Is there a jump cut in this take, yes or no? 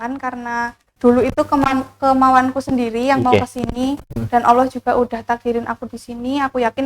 yes